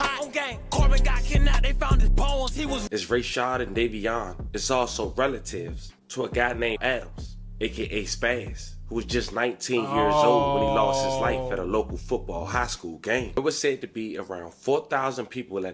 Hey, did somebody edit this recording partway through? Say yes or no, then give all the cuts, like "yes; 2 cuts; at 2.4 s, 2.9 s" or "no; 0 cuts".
yes; 2 cuts; at 2.8 s, 13.4 s